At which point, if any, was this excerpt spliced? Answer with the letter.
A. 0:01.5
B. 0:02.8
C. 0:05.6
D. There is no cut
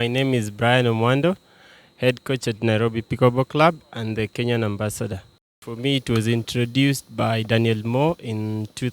C